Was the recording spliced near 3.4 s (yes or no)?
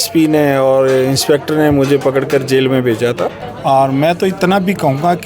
yes